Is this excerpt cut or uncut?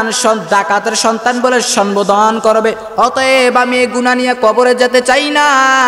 cut